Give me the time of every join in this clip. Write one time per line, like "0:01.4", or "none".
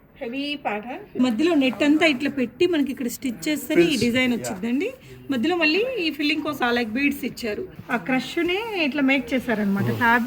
0:01.2
0:06.6
0:07.7